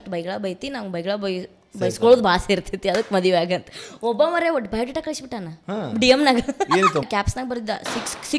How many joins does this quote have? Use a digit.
1